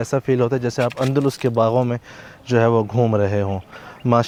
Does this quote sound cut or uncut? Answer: uncut